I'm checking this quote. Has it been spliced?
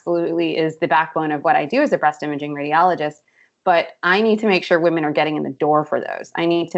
no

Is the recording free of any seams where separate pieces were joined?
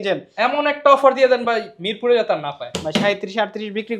yes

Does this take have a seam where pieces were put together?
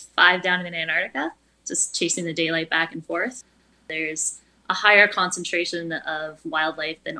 yes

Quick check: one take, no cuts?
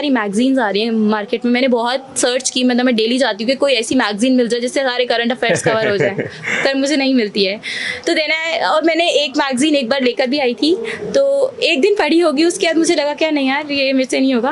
yes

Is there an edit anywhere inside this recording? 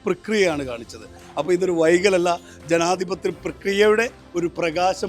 yes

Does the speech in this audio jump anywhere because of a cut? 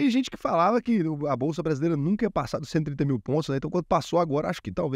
no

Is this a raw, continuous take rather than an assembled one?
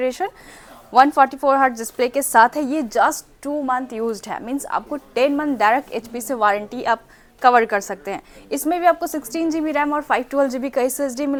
yes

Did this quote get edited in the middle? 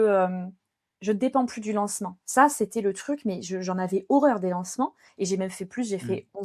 yes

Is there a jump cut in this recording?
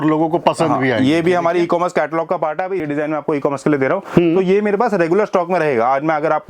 yes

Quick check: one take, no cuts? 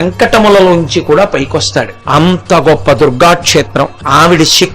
no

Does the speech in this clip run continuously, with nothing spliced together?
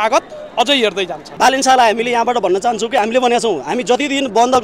no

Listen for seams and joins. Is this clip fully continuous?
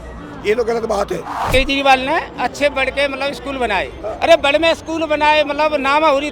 no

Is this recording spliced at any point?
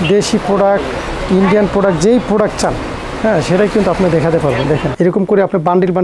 yes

